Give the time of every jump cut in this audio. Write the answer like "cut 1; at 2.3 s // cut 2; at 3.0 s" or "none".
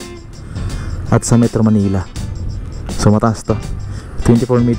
none